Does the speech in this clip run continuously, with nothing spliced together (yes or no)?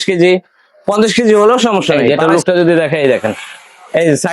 no